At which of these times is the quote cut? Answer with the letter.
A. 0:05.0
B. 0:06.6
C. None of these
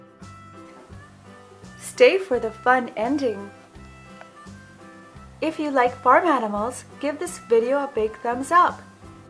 B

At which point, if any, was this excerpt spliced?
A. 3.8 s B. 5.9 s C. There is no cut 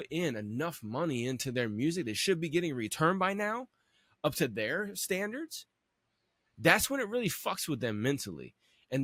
C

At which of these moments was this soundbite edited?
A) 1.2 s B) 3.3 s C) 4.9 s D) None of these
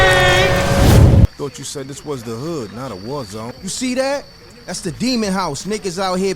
A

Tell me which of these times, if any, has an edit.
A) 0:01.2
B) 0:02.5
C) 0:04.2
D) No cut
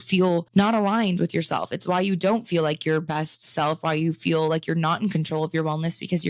D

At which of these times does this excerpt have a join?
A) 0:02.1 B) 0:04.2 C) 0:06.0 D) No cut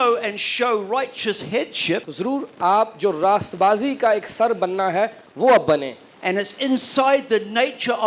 A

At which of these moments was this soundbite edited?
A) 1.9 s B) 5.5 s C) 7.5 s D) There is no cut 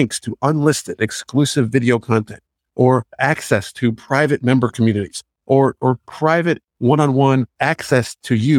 C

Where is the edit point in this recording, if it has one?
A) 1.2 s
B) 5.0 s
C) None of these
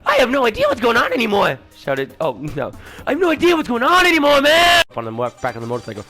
B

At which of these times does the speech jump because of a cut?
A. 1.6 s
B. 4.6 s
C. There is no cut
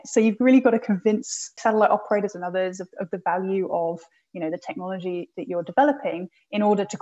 A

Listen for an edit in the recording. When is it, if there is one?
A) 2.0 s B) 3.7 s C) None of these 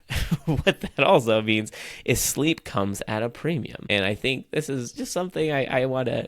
B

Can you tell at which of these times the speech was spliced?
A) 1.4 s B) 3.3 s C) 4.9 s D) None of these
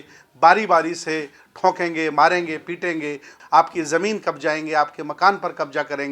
B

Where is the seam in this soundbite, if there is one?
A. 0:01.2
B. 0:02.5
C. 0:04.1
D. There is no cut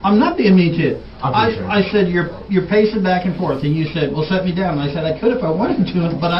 D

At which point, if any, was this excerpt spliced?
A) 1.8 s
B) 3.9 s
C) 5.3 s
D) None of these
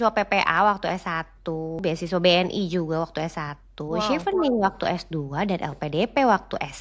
A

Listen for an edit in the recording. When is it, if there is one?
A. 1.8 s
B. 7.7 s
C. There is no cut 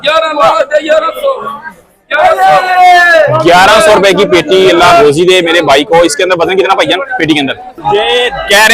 B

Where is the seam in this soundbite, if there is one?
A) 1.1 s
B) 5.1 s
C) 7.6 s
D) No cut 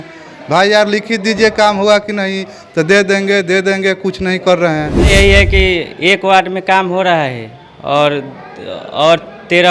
B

